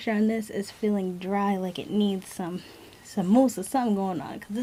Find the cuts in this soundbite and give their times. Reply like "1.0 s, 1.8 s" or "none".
none